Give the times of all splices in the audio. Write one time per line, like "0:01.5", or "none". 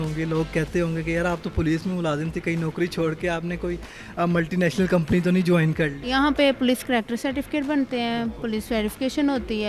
0:06.0